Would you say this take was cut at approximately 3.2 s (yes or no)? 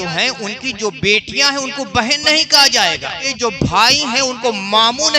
yes